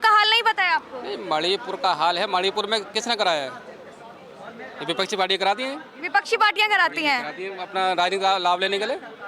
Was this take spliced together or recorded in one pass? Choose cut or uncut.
uncut